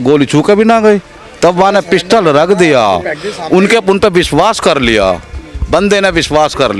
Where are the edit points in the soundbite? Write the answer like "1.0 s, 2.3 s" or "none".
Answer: none